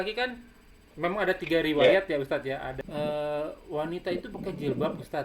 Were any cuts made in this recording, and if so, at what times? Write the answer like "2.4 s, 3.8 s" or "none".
2.8 s